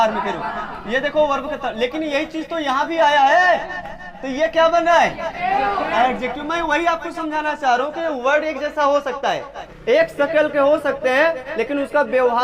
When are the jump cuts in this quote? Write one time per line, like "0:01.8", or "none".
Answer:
0:09.7